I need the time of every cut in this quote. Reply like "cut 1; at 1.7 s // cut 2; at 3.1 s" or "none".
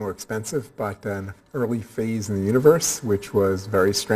none